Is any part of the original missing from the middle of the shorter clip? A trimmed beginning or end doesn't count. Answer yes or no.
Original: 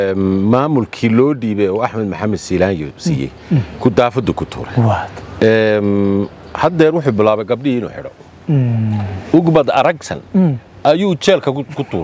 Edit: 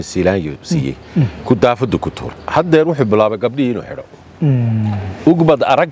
yes